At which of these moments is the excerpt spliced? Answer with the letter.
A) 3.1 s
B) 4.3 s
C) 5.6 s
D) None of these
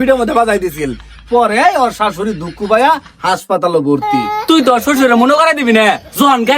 B